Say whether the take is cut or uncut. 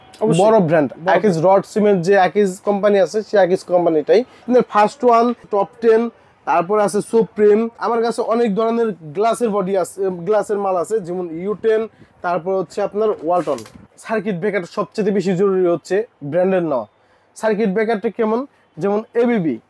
cut